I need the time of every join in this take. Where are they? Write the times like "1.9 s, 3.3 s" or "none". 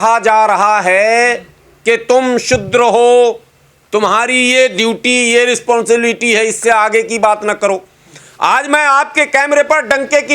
none